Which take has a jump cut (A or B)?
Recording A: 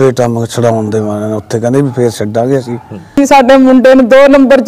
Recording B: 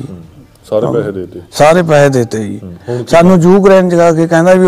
A